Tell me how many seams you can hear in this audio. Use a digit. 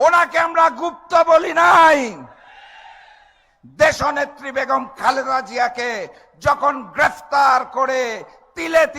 0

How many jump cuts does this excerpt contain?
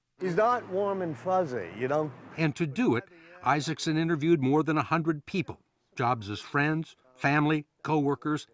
1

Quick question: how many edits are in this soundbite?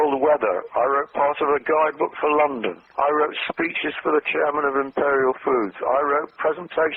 0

